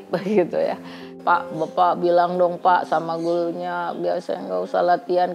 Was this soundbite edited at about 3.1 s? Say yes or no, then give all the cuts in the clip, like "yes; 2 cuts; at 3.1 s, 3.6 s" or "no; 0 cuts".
no; 1 cut; at 1.0 s